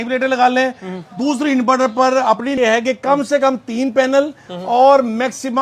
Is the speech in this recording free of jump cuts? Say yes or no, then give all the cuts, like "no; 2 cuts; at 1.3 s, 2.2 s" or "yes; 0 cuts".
no; 1 cut; at 2.6 s